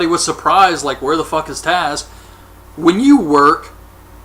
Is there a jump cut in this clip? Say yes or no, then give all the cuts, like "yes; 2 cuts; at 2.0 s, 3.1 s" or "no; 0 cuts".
yes; 1 cut; at 1.2 s